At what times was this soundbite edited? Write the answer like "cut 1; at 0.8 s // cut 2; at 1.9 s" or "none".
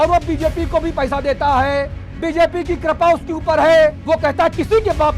cut 1; at 4.0 s

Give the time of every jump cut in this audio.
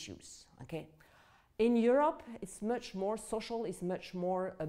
none

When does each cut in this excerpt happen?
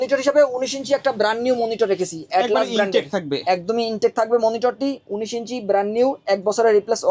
none

